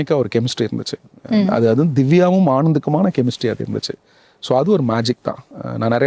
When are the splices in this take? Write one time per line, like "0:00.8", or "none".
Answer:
none